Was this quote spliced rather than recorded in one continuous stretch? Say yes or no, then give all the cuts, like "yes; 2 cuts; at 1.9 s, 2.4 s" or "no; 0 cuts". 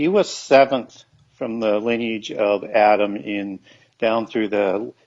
yes; 1 cut; at 1.5 s